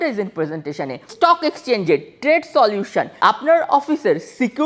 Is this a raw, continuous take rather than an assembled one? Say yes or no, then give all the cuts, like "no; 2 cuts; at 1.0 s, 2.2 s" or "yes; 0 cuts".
no; 2 cuts; at 1.1 s, 3.1 s